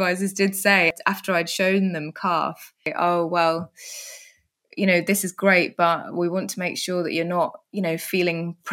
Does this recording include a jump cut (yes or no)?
yes